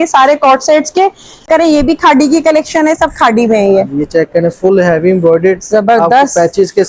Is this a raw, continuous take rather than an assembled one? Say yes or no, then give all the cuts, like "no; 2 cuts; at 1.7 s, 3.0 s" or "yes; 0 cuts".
no; 1 cut; at 1.4 s